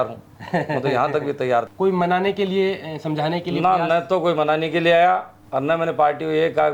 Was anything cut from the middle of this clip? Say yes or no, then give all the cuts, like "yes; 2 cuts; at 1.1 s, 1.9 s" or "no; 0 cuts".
yes; 2 cuts; at 1.7 s, 5.4 s